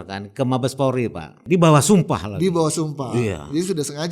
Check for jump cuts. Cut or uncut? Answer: cut